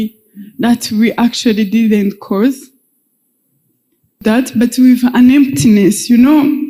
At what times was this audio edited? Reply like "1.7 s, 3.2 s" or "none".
4.2 s